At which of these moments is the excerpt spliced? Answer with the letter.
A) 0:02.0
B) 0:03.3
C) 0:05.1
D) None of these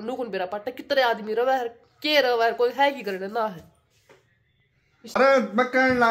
C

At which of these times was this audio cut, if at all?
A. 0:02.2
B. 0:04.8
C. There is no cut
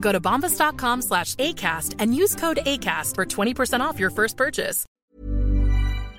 B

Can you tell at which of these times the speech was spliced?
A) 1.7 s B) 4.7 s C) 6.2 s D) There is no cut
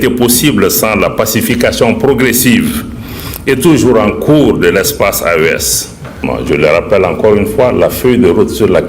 C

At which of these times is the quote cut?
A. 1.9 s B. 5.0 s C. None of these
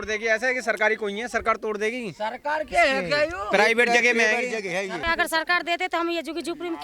B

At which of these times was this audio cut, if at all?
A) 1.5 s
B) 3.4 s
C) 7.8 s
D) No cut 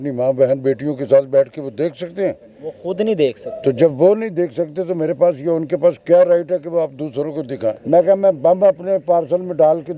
C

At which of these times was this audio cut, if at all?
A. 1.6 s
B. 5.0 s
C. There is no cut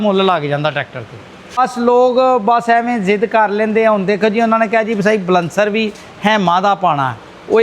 A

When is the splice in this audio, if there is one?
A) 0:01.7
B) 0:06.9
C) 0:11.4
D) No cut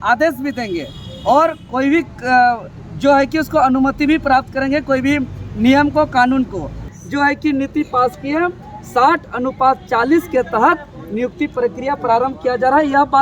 B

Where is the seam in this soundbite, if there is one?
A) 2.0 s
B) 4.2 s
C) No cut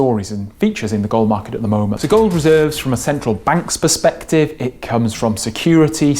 A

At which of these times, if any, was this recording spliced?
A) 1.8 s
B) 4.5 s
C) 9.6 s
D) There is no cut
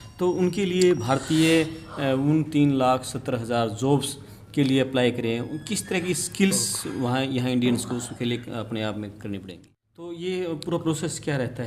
C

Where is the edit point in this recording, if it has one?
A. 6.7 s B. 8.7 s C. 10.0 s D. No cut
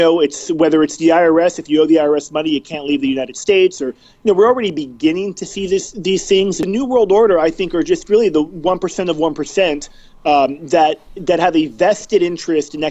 A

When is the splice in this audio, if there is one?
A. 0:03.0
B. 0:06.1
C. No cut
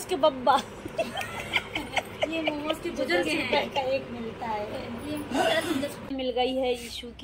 B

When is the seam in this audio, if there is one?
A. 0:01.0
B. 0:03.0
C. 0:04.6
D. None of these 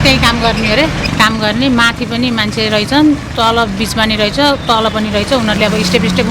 A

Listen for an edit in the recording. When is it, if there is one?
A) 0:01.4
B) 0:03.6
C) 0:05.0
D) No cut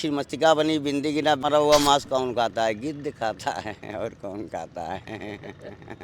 A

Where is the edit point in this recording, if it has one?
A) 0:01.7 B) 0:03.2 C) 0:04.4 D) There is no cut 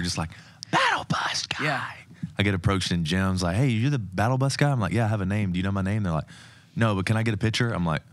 D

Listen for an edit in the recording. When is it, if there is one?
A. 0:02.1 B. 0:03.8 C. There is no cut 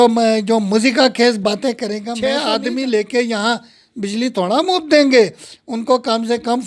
A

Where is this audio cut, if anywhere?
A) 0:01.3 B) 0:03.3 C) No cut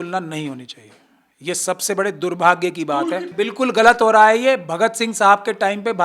B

